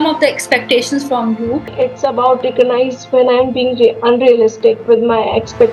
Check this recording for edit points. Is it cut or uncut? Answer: cut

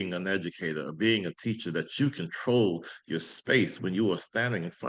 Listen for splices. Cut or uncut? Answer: uncut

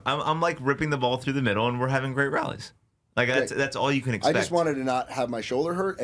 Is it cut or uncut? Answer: uncut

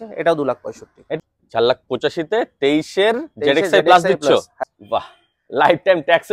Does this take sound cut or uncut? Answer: cut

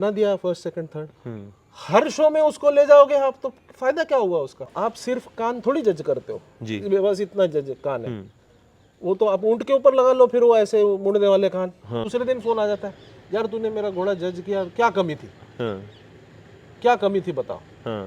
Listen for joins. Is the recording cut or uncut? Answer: cut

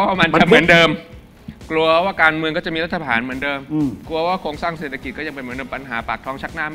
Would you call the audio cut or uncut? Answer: uncut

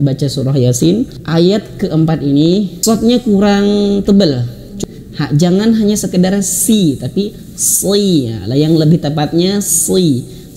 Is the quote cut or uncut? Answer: cut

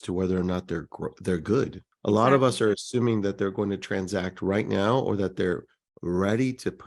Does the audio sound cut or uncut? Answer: cut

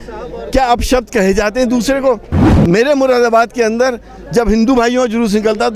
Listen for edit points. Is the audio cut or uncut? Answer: uncut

